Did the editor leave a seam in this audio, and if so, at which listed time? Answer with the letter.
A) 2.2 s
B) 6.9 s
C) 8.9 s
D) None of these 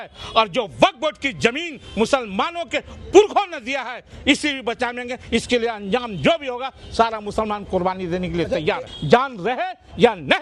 C